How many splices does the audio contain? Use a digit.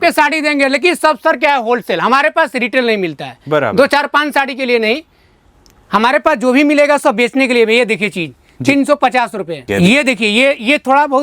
1